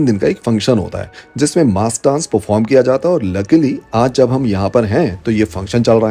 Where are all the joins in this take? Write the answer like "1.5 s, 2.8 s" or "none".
none